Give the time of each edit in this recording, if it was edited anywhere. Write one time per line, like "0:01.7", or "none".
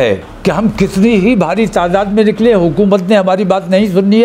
none